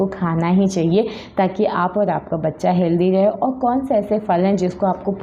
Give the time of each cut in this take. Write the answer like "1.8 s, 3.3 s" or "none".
none